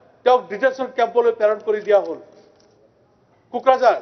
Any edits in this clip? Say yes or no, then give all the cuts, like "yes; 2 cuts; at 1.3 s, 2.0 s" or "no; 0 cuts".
no; 0 cuts